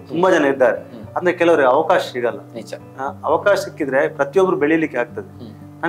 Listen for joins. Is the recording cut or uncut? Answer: uncut